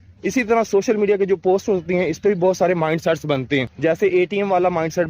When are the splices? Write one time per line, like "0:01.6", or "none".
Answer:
0:03.7